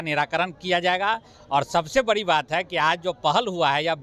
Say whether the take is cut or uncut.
uncut